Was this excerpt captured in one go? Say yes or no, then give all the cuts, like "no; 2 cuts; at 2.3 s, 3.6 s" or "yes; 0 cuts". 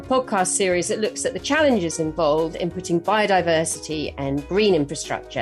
yes; 0 cuts